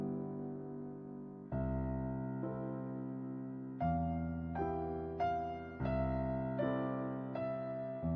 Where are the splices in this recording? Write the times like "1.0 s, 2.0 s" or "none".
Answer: none